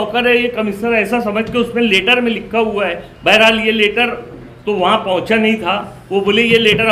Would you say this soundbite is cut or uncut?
uncut